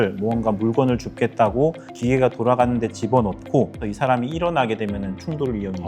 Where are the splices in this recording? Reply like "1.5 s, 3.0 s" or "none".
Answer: 3.8 s